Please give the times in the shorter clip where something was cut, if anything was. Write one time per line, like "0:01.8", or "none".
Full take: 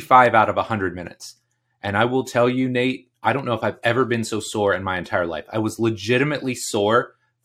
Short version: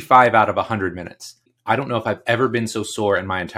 0:01.5